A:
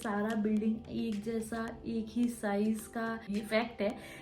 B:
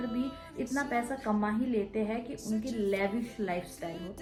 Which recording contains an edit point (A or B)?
A